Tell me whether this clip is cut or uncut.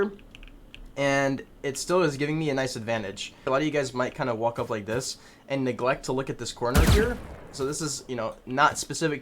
cut